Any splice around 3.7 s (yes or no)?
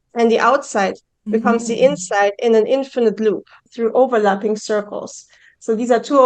yes